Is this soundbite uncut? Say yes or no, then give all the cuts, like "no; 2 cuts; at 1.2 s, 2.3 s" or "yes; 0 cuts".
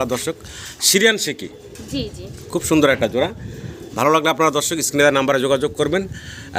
yes; 0 cuts